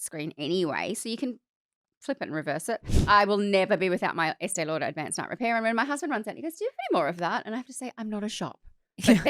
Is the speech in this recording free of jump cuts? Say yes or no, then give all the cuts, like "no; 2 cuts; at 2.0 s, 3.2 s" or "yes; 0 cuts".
no; 1 cut; at 2.9 s